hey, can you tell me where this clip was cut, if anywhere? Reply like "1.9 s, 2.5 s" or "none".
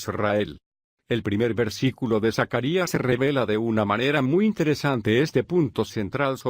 3.9 s